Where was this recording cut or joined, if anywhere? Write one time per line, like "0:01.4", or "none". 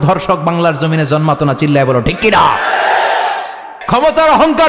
0:03.8